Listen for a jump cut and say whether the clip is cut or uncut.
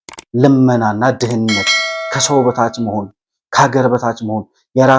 uncut